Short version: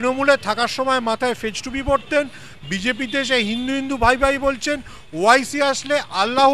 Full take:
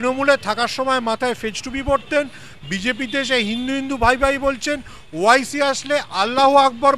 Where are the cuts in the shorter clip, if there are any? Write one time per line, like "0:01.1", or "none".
none